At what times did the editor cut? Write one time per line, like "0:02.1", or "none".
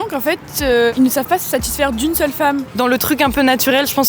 0:00.9
0:02.7